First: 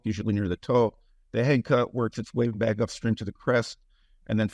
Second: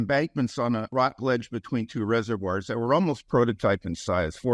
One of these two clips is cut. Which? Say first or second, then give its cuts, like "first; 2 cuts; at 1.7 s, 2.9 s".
second; 1 cut; at 0.9 s